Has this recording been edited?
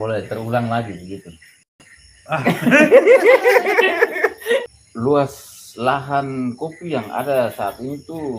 yes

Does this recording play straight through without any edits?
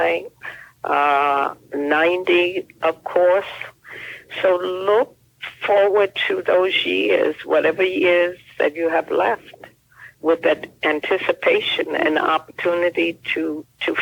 yes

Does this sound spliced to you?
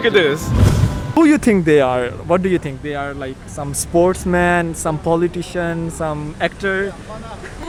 no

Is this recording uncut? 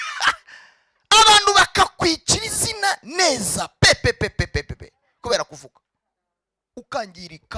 yes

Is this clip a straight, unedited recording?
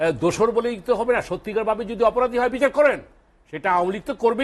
yes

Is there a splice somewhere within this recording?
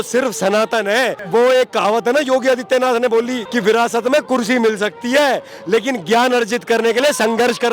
yes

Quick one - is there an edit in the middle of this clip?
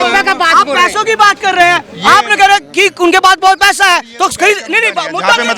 no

